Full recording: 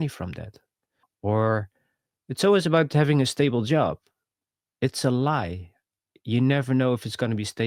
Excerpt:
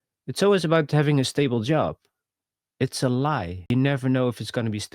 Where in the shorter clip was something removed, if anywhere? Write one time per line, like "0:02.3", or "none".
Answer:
0:03.7